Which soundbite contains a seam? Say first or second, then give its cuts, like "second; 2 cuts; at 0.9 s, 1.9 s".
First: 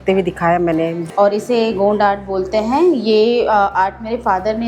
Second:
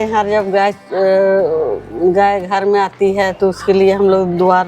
first; 1 cut; at 1.0 s